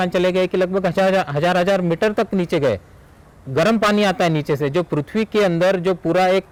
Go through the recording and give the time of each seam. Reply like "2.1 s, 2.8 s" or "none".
none